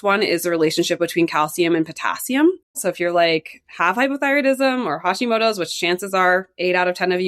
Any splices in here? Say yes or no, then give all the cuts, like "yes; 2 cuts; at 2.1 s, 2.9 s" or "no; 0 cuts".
yes; 1 cut; at 2.8 s